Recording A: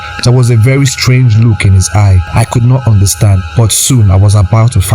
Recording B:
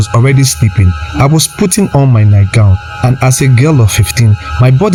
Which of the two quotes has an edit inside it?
A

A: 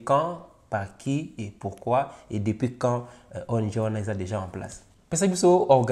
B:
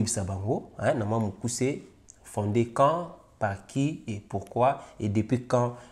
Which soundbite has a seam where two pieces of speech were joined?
A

